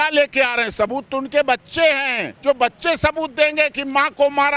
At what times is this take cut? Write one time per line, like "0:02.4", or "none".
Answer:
none